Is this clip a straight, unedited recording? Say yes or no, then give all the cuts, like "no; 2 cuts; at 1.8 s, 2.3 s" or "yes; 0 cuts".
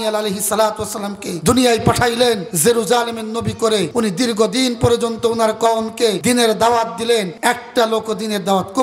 no; 5 cuts; at 1.3 s, 2.5 s, 3.9 s, 6.2 s, 7.3 s